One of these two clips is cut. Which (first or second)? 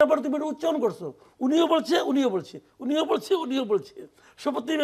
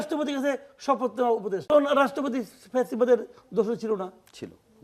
second